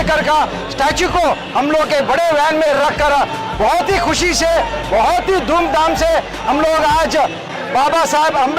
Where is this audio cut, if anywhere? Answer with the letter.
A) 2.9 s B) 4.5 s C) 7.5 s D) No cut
C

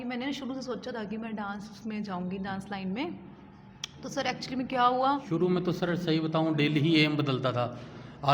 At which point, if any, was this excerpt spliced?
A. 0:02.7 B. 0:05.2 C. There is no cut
B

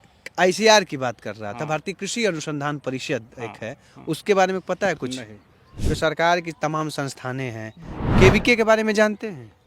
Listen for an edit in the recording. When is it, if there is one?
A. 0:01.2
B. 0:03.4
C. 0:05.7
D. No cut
C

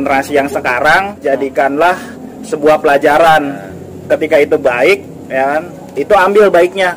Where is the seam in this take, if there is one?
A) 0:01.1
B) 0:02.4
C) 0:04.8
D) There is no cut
A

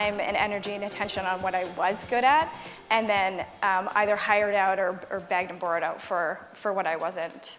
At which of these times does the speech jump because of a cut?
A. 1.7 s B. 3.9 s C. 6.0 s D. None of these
D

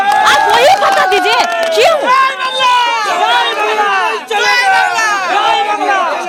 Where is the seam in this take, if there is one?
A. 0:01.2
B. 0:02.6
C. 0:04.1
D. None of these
D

